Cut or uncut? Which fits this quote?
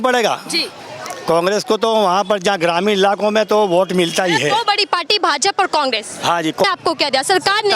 cut